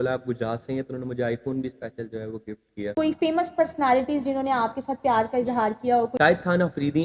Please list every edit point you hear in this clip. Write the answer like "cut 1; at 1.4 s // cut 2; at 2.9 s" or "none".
cut 1; at 2.8 s // cut 2; at 6.1 s